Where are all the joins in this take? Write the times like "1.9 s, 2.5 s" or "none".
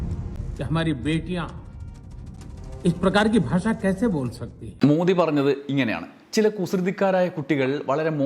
none